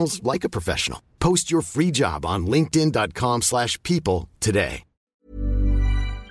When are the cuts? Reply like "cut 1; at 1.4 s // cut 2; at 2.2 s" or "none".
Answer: cut 1; at 5.0 s